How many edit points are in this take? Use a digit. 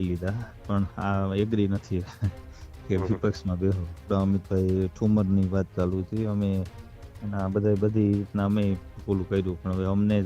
1